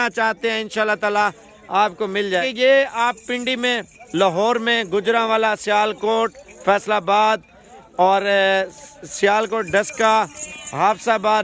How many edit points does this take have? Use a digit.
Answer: 1